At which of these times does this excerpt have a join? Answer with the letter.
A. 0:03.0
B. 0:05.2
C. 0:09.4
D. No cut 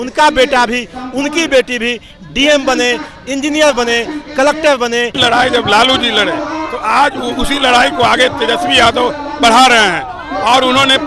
B